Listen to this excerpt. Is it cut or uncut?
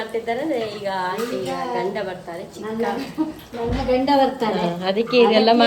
uncut